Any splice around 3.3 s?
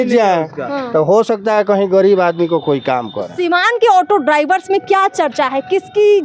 yes; 1 cut; at 3.3 s

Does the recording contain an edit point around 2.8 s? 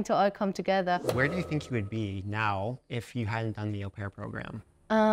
no; 1 cut; at 1.1 s

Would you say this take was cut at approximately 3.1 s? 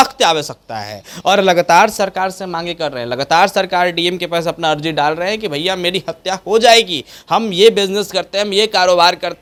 no; 0 cuts

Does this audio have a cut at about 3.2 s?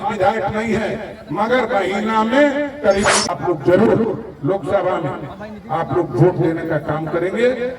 yes; 1 cut; at 3.2 s

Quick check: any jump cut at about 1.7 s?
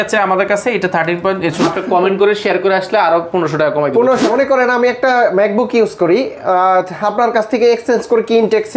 yes; 2 cuts; at 1.7 s, 4.3 s

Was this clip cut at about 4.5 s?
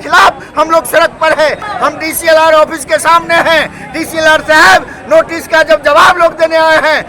no; 1 cut; at 1.7 s

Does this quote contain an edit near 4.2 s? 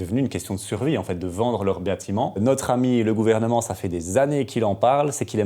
no; 1 cut; at 2.4 s

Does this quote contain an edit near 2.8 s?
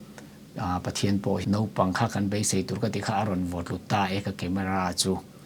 no; 1 cut; at 1.4 s

